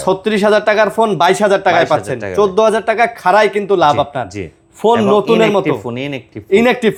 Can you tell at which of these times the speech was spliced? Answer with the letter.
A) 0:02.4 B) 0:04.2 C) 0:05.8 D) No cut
D